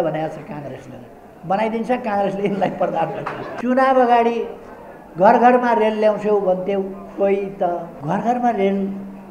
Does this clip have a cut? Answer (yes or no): yes